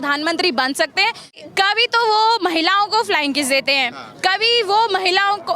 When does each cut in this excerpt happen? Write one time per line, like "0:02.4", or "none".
0:01.3